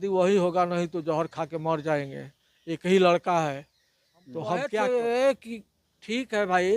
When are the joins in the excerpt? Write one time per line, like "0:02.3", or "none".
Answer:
0:04.7